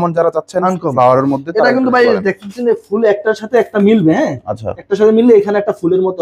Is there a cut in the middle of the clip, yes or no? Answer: no